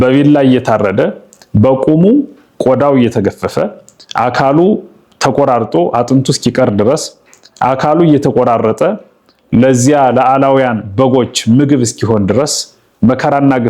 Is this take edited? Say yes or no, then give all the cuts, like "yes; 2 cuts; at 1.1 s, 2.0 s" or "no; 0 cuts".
no; 0 cuts